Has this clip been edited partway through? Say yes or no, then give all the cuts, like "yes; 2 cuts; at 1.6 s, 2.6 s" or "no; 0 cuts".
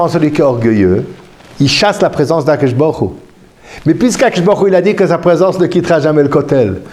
no; 0 cuts